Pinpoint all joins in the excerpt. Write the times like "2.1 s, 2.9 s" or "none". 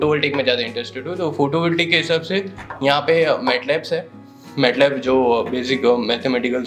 none

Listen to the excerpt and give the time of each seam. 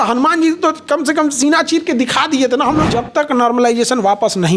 2.9 s

